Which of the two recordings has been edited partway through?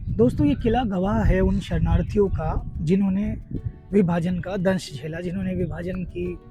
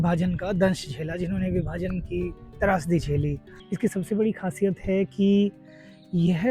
second; 1 cut; at 3.5 s

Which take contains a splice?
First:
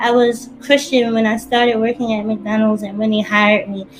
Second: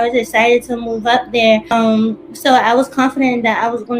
second; 1 cut; at 1.7 s

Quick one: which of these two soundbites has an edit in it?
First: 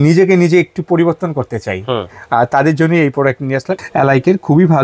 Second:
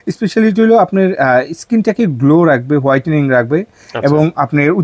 first; 1 cut; at 3.8 s

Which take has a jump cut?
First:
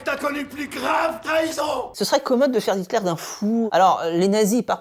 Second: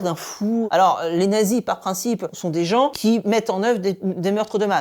first; 1 cut; at 1.9 s

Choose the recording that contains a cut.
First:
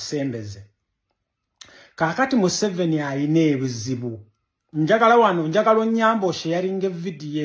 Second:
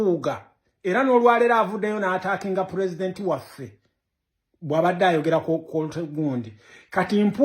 second; 1 cut; at 2.2 s

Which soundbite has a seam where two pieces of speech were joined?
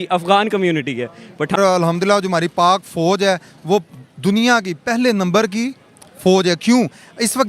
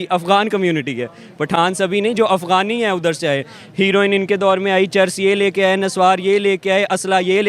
first; 1 cut; at 1.6 s

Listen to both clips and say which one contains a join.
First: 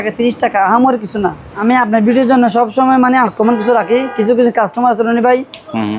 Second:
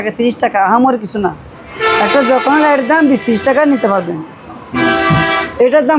first; 1 cut; at 1.5 s

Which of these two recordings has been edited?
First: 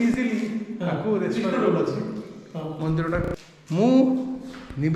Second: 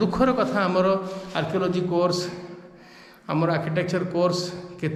first; 1 cut; at 3.2 s

